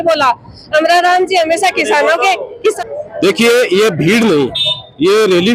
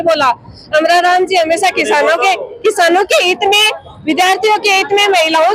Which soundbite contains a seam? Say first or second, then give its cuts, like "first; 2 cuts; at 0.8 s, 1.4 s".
first; 1 cut; at 2.8 s